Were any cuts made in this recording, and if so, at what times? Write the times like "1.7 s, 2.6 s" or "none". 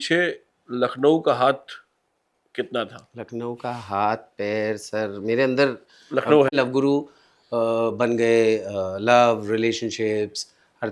6.5 s